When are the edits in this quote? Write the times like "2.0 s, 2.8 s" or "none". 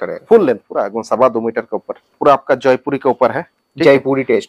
2.1 s